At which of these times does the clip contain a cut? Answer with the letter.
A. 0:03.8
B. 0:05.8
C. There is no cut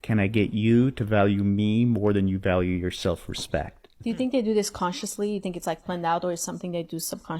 A